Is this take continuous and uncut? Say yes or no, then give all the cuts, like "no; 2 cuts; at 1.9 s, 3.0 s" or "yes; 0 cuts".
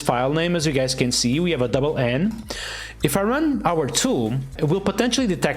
no; 1 cut; at 4.5 s